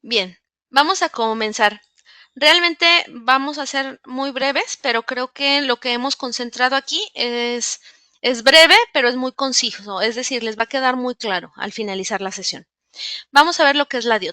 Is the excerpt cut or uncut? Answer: cut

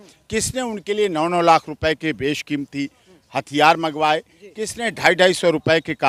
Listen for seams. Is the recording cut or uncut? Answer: uncut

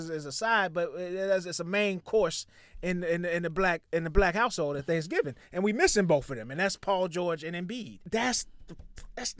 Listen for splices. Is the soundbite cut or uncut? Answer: cut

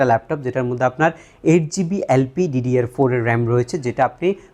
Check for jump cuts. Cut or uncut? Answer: uncut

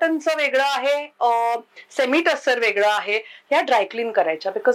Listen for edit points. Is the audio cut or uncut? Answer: uncut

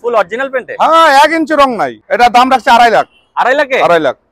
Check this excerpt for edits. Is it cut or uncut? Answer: cut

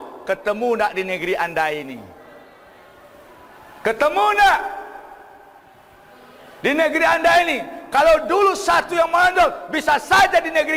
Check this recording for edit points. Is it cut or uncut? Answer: uncut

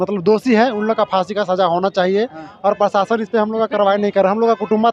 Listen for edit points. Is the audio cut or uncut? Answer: uncut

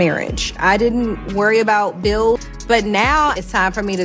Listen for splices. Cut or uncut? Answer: cut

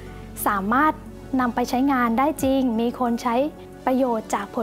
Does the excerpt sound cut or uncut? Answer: uncut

